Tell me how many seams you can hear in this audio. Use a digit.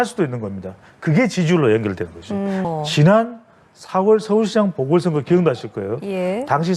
1